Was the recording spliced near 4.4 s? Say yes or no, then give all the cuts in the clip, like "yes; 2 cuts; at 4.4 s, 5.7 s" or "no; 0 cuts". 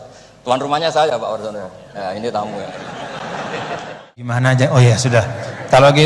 yes; 1 cut; at 4.4 s